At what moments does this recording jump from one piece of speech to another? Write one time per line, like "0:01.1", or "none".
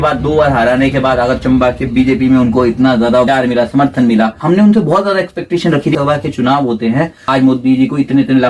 0:03.3
0:04.4
0:05.9
0:07.2